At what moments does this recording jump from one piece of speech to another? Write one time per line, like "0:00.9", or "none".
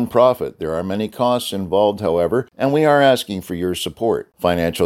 0:02.5